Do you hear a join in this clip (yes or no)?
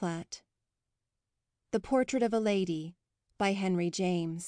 no